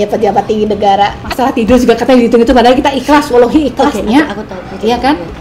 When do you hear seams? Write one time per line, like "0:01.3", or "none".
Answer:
0:01.2